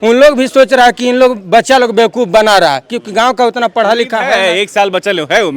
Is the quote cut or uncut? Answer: uncut